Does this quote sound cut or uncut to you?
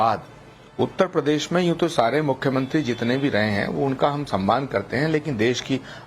cut